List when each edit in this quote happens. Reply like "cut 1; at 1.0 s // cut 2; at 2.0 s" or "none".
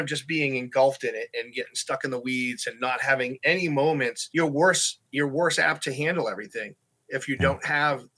cut 1; at 4.2 s

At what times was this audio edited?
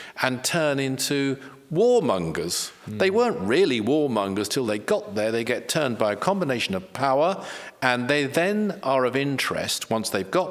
none

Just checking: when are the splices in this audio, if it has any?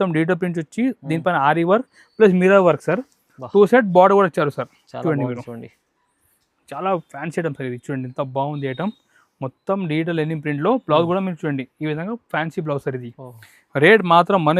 none

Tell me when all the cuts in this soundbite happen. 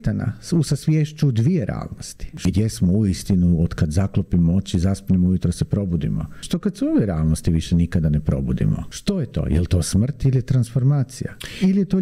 cut 1; at 2.4 s // cut 2; at 6.5 s // cut 3; at 8.9 s

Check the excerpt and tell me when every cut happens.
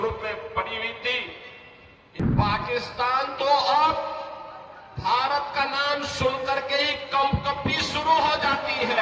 cut 1; at 2.0 s

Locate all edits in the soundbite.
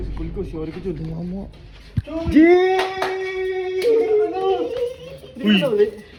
none

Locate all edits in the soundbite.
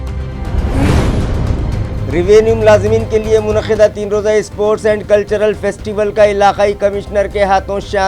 cut 1; at 1.2 s

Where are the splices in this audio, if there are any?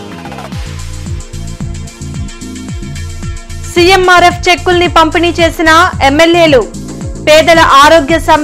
cut 1; at 3.1 s

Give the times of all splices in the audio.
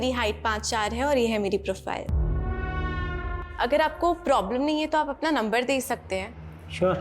cut 1; at 3.4 s

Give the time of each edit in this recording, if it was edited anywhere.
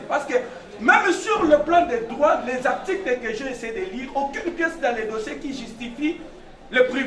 none

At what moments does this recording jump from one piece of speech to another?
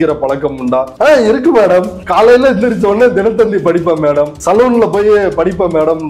cut 1; at 0.9 s // cut 2; at 2.0 s // cut 3; at 4.3 s

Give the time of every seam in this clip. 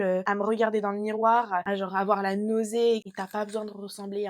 cut 1; at 3.0 s

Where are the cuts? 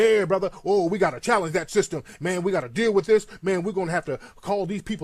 none

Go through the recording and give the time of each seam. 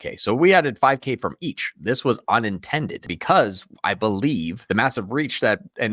cut 1; at 3.1 s // cut 2; at 4.6 s

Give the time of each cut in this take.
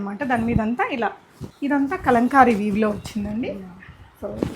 cut 1; at 1.4 s

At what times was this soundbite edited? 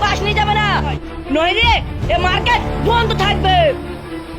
cut 1; at 1.0 s

